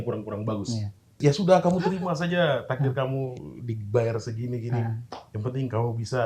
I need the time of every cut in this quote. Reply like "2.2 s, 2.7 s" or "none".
1.1 s